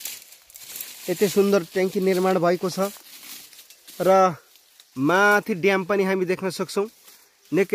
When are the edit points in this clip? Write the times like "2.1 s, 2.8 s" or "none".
none